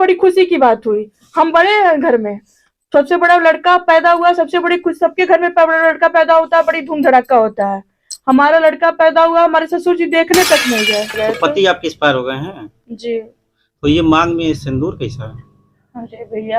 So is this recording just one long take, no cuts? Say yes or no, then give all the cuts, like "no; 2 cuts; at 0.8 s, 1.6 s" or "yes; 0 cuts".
no; 1 cut; at 11.2 s